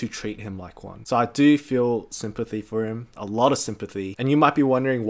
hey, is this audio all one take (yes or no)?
yes